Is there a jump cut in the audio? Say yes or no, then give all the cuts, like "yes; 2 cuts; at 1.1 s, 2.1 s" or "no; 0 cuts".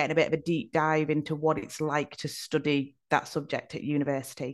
no; 0 cuts